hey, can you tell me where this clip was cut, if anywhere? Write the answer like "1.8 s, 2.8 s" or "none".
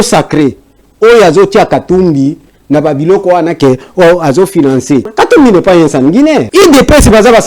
5.1 s, 6.5 s